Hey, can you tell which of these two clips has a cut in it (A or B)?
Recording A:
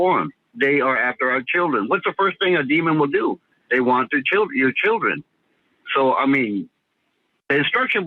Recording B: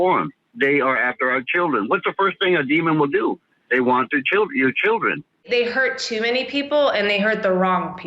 B